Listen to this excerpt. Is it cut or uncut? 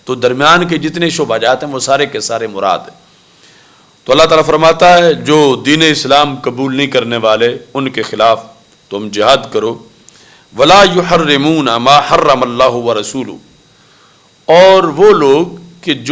uncut